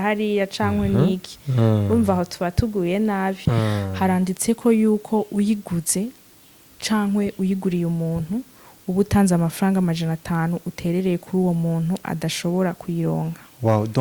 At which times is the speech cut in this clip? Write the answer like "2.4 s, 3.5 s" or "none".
3.4 s